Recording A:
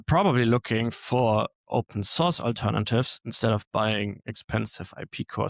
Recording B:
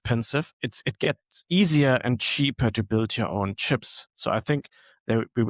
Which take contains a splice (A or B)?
B